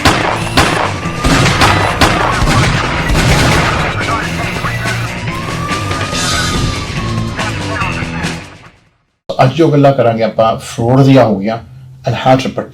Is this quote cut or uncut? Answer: cut